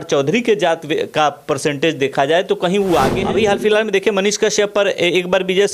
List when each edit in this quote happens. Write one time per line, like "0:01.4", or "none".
0:03.2